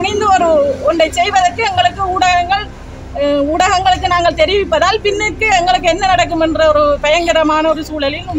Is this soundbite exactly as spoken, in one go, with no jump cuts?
yes; 0 cuts

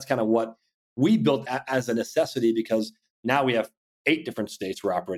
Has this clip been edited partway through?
yes; 1 cut; at 1.4 s

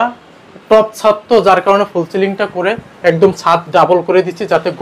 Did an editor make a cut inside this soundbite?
no; 0 cuts

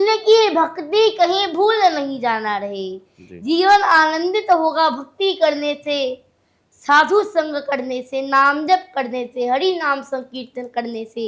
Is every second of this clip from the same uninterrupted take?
yes; 0 cuts

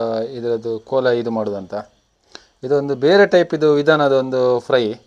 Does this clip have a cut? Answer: no; 0 cuts

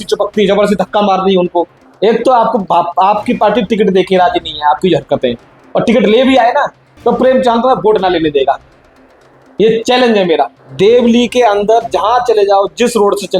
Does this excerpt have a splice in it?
yes; 2 cuts; at 1.8 s, 10.6 s

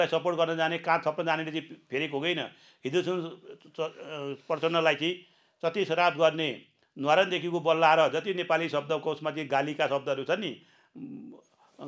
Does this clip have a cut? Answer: no; 0 cuts

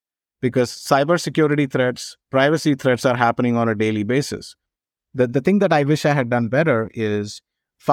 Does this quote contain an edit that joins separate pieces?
yes; 1 cut; at 4.8 s

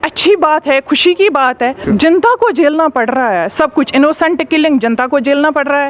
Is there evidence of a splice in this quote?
yes; 1 cut; at 1.8 s

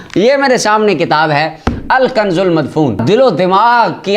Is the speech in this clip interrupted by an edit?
yes; 1 cut; at 3.0 s

